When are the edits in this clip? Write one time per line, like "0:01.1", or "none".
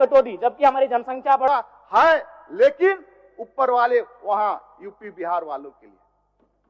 0:01.5